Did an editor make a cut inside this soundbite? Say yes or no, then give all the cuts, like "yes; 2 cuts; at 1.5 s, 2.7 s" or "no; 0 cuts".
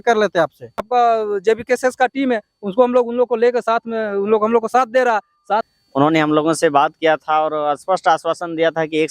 yes; 2 cuts; at 0.8 s, 5.7 s